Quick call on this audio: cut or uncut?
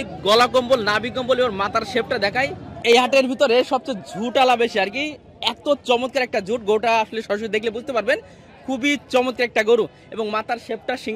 cut